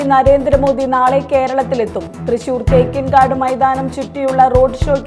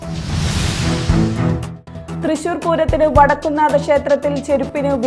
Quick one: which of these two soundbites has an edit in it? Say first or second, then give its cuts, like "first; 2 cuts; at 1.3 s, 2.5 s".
second; 1 cut; at 1.7 s